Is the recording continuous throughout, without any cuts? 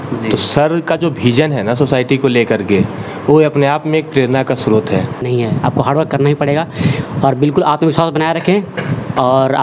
no; 1 cut; at 5.2 s

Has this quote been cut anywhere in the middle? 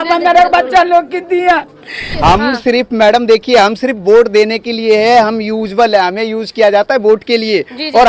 yes; 1 cut; at 2.1 s

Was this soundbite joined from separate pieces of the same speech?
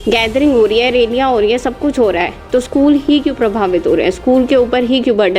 no; 0 cuts

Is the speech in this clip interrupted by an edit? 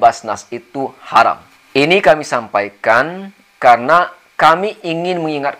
yes; 1 cut; at 1.5 s

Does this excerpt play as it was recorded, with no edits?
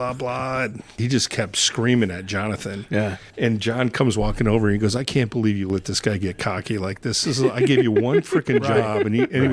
no; 1 cut; at 0.9 s

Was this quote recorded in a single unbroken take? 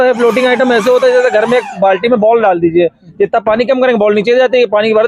yes; 0 cuts

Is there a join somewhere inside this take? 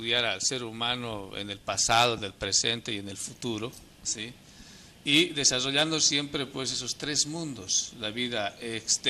yes; 1 cut; at 4.2 s

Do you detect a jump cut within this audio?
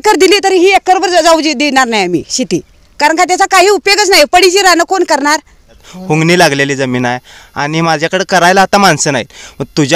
yes; 1 cut; at 5.9 s

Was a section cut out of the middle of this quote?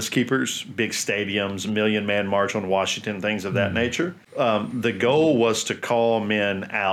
yes; 1 cut; at 4.2 s

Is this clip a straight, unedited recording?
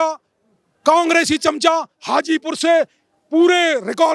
yes; 0 cuts

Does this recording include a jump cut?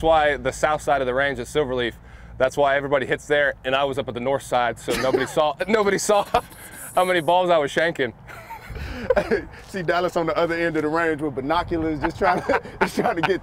no; 0 cuts

